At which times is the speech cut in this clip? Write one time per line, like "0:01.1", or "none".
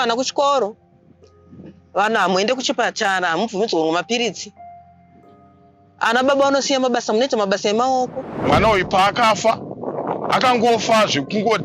0:08.3